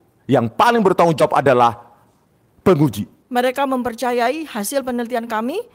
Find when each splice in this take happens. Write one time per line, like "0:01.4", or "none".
0:03.1